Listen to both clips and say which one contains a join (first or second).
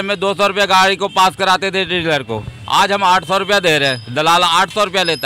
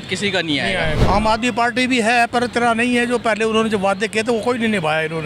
second